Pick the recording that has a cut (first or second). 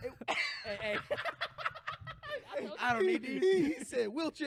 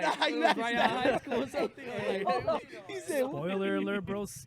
second